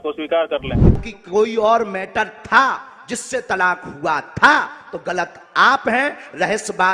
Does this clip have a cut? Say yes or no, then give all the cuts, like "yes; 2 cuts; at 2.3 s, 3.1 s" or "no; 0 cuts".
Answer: yes; 1 cut; at 1.1 s